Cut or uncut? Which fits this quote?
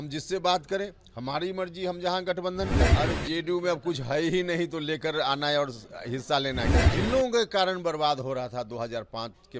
cut